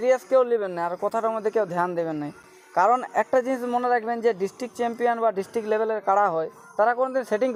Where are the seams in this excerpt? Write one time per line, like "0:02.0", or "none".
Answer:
none